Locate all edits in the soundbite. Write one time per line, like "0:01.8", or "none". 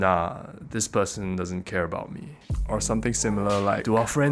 none